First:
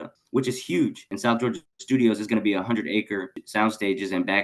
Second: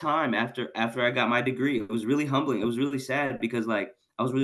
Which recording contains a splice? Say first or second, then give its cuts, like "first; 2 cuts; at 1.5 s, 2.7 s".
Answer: first; 2 cuts; at 1.1 s, 3.4 s